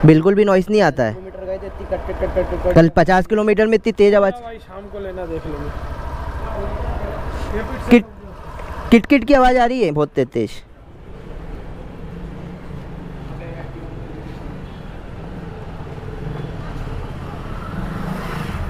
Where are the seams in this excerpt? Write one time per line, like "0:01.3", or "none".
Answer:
none